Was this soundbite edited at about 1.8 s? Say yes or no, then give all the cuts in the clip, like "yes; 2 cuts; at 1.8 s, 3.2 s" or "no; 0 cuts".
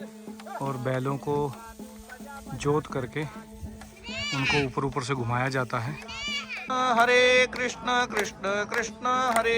no; 1 cut; at 6.7 s